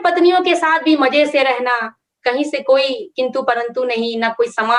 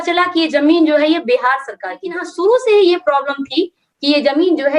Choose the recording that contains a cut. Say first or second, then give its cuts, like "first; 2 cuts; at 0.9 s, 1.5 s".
second; 1 cut; at 2.3 s